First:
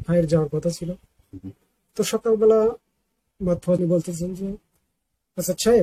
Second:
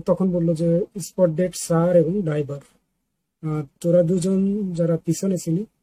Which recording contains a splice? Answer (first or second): first